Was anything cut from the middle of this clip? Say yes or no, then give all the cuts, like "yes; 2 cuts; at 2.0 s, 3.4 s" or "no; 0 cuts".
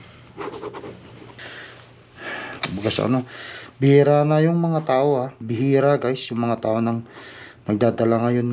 yes; 1 cut; at 1.4 s